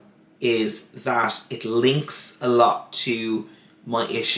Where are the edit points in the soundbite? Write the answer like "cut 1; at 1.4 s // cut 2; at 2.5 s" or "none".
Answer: none